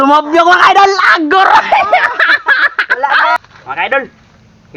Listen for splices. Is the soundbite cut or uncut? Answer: cut